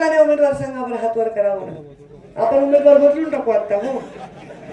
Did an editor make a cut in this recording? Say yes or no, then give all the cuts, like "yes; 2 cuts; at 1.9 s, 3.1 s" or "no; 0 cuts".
no; 0 cuts